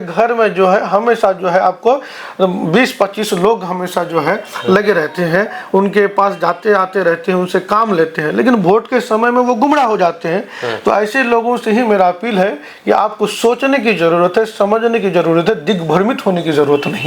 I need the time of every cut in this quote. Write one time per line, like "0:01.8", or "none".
none